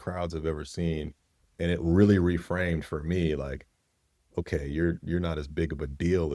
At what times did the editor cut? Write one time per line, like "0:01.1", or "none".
0:01.4

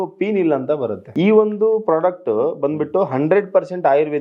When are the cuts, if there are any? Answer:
0:01.0

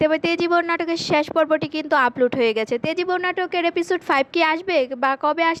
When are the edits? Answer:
none

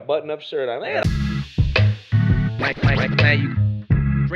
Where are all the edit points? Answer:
0:01.0

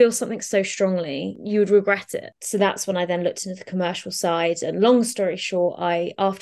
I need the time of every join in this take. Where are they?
0:01.3
0:02.3

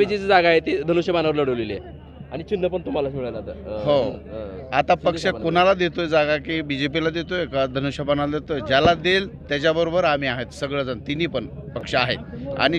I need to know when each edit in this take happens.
none

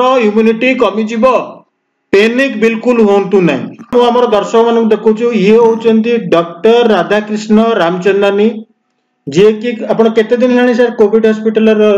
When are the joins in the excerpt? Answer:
0:03.9

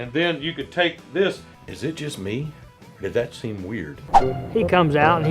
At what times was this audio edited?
0:01.5
0:04.1

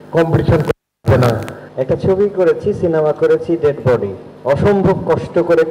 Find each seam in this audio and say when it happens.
0:01.6

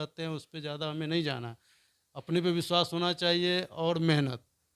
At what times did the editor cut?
none

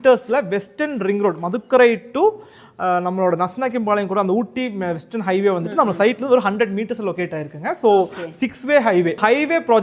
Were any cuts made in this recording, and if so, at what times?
none

